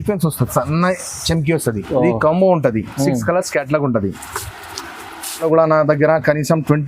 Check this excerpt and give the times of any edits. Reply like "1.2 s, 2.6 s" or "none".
5.4 s